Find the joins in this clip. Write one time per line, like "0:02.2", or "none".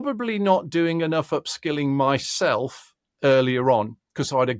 none